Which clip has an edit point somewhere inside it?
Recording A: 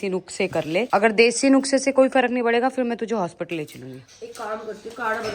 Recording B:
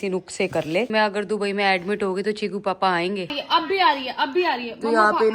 B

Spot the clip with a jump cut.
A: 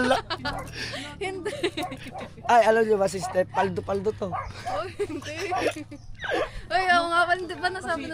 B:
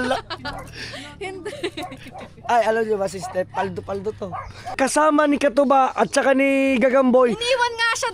B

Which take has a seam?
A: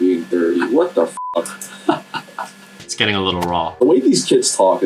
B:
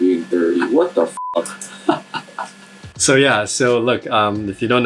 A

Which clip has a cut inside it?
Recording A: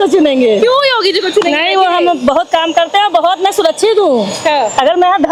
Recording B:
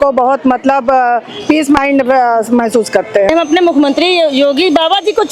B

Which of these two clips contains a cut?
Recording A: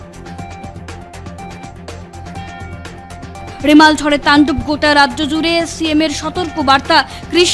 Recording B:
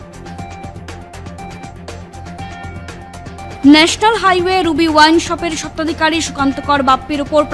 A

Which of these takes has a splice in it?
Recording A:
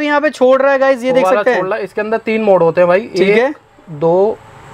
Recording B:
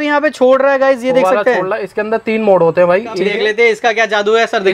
B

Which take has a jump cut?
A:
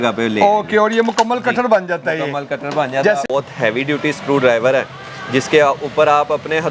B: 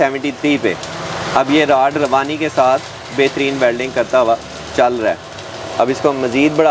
A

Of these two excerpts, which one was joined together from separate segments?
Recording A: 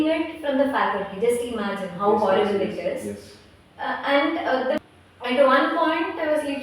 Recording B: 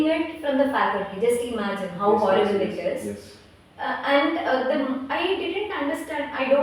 A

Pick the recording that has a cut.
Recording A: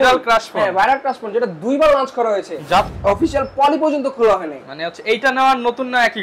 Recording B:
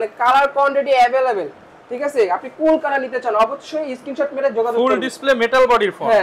A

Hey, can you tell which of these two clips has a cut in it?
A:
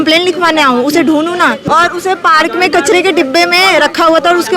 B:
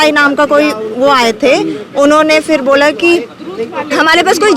A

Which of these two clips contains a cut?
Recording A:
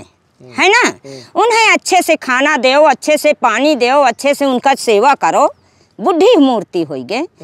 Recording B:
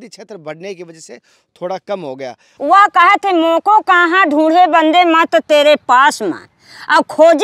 B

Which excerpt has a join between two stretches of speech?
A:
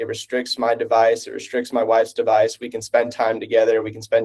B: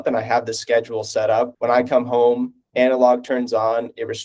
B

